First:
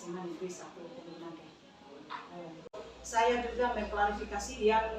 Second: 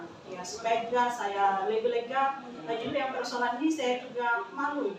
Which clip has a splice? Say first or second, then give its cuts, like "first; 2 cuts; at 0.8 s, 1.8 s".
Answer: first; 1 cut; at 2.7 s